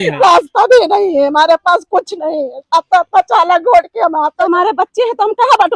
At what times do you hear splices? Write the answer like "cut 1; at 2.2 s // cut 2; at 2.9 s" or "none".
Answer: cut 1; at 4.4 s